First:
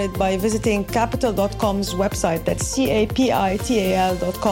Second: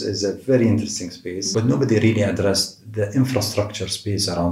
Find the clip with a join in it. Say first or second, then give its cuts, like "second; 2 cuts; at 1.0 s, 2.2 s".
second; 1 cut; at 1.5 s